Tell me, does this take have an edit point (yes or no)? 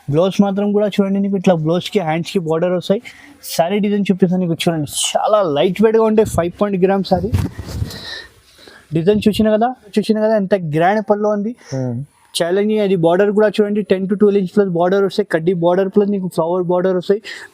yes